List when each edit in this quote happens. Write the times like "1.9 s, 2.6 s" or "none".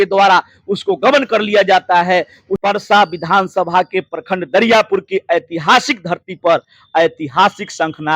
2.4 s